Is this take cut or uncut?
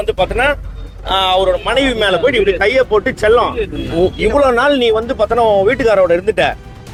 uncut